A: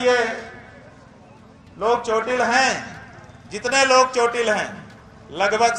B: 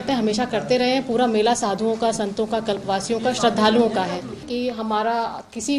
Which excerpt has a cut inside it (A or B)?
B